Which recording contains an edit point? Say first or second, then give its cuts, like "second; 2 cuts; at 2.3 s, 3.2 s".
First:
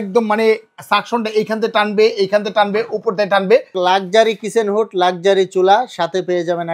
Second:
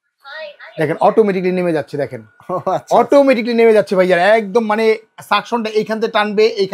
first; 1 cut; at 3.7 s